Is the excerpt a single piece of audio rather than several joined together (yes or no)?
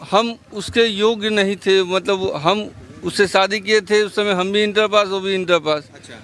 yes